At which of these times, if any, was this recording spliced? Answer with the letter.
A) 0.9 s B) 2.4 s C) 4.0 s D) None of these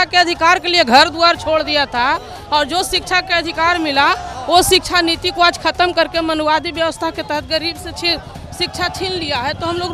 D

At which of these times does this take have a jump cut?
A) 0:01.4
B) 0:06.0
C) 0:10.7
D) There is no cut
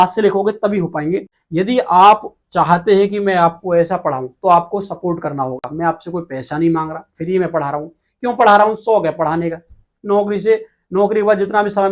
A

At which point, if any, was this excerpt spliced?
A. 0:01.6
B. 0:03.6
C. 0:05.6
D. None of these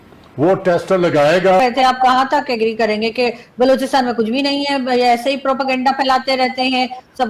A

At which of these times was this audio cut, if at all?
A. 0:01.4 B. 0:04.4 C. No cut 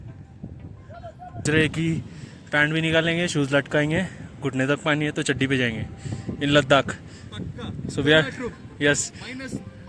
A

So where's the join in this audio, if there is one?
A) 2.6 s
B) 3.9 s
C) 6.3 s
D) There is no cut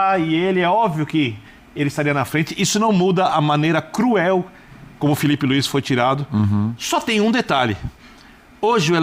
D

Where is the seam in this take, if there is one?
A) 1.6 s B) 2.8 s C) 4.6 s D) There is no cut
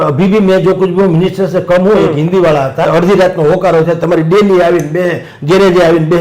B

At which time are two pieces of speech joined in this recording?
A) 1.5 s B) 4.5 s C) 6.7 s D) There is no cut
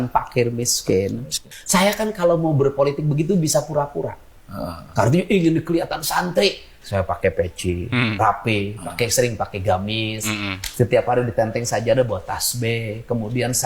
A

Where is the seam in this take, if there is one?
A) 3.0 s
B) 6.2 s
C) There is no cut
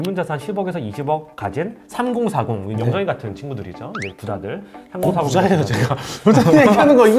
C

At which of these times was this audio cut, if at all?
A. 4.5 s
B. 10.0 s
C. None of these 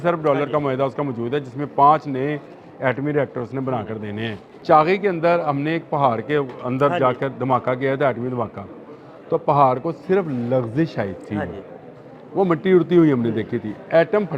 A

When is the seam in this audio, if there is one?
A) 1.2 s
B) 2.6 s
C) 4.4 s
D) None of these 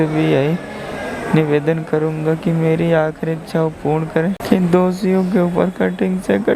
C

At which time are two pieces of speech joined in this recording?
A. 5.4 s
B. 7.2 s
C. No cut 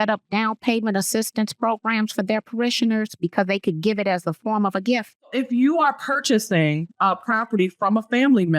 A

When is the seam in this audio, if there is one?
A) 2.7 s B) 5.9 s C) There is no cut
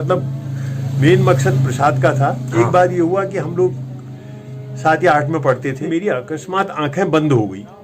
B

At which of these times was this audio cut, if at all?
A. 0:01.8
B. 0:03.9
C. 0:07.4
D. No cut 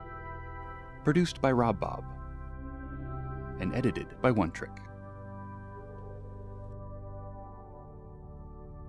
A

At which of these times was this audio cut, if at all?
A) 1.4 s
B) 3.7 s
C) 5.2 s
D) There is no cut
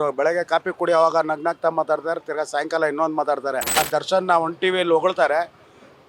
B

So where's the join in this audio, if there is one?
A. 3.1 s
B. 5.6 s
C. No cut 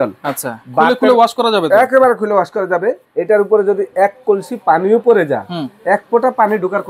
A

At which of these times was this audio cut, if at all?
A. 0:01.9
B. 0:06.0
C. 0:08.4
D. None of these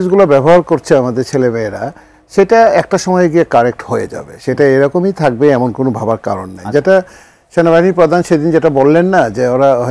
D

